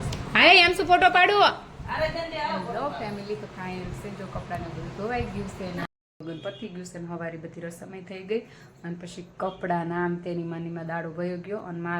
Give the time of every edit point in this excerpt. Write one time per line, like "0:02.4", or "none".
0:05.9